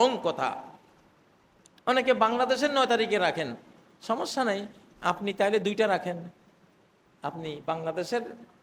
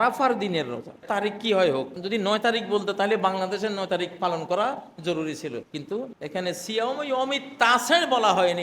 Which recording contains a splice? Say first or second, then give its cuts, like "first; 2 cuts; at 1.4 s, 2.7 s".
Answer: second; 3 cuts; at 0.9 s, 2.0 s, 5.8 s